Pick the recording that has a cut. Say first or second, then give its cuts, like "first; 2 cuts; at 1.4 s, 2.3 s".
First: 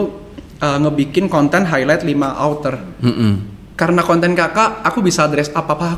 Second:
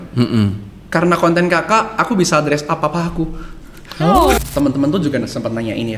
second; 1 cut; at 4.4 s